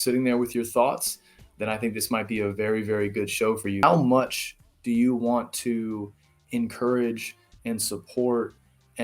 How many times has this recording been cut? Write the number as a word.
one